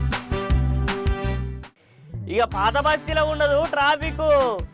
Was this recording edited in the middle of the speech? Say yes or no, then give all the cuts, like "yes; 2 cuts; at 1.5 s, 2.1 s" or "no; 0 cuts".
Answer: no; 0 cuts